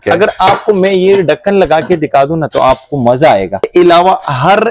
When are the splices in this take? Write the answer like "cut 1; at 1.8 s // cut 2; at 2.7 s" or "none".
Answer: cut 1; at 3.7 s